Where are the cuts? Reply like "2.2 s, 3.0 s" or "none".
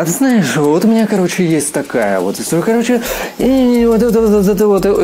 none